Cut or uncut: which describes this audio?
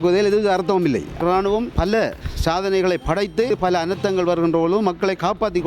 cut